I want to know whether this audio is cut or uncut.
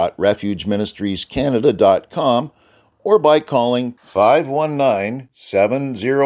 uncut